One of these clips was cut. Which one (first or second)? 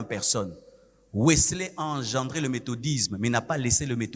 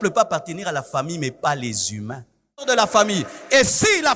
second